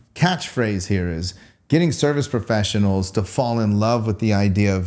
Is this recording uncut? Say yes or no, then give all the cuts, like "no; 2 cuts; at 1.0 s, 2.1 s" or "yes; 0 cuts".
yes; 0 cuts